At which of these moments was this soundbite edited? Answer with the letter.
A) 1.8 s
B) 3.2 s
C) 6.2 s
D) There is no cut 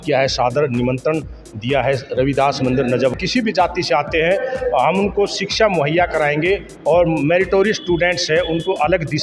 B